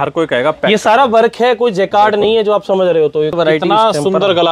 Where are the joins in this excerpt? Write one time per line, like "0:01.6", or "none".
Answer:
0:03.3